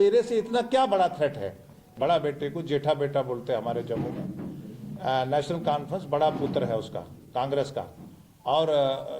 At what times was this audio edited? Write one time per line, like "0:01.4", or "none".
0:01.9